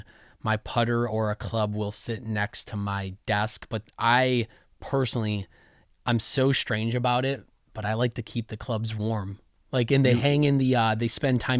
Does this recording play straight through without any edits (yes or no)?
yes